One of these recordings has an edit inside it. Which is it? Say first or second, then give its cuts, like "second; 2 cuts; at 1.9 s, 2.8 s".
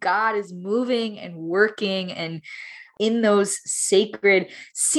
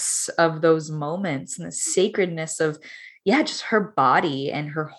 first; 1 cut; at 2.9 s